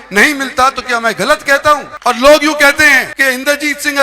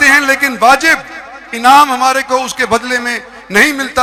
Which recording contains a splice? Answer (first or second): first